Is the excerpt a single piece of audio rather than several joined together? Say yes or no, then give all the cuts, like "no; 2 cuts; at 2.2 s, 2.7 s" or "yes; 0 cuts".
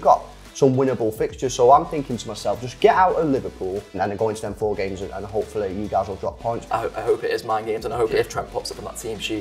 no; 2 cuts; at 6.6 s, 8.1 s